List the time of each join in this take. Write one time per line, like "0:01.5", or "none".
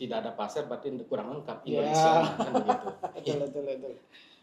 none